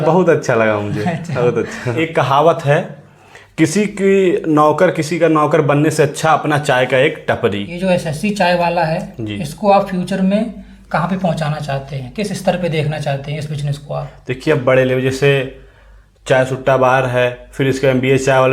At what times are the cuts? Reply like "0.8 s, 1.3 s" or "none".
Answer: 1.9 s, 7.7 s